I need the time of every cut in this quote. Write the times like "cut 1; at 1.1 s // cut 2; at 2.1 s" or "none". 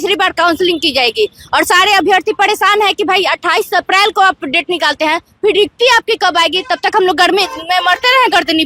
none